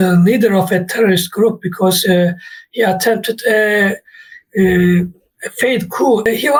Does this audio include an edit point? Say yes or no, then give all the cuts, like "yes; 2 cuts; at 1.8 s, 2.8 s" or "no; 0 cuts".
no; 0 cuts